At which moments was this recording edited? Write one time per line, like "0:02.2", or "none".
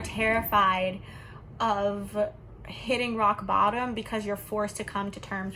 none